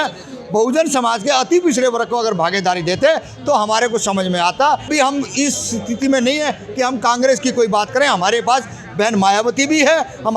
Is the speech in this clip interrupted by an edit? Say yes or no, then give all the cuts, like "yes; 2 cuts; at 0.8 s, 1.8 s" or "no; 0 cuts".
yes; 1 cut; at 4.9 s